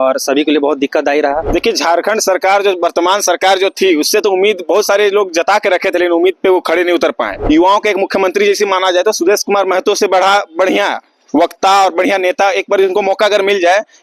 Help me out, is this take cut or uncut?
cut